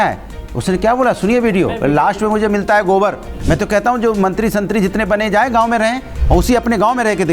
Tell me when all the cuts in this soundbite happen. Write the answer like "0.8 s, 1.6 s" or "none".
3.4 s

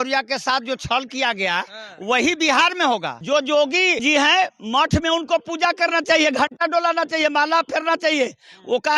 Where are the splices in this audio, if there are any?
3.1 s, 4.0 s

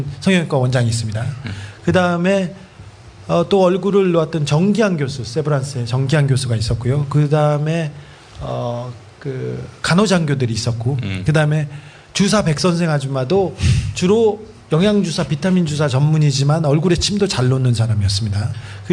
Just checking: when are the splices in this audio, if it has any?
9.3 s

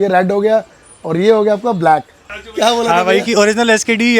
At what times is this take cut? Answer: 2.2 s

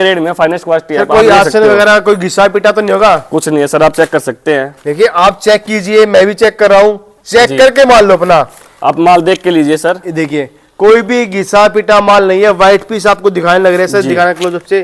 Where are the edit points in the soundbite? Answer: none

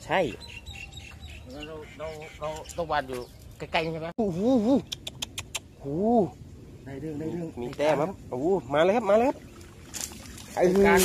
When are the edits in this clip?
4.2 s

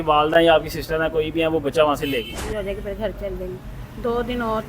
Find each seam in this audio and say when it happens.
2.4 s

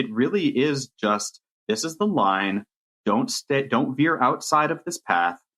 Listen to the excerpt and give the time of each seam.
none

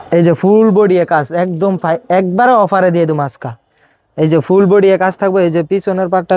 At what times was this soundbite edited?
none

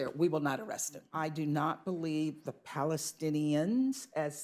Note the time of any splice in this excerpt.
1.1 s

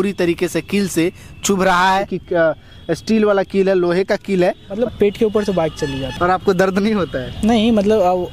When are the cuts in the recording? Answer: 2.2 s, 4.8 s, 6.1 s

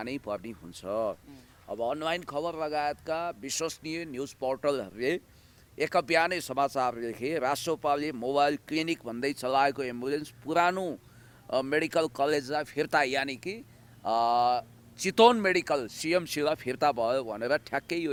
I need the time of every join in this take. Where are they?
none

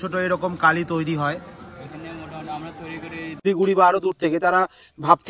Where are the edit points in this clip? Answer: 3.4 s

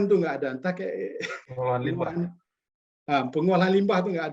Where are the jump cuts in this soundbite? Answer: 1.4 s

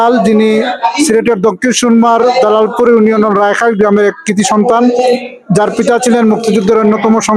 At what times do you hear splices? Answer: none

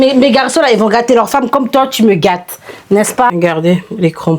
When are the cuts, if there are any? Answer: 3.3 s

